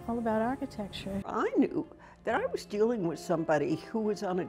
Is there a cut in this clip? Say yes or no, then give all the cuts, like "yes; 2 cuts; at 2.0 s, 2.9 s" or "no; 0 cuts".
no; 0 cuts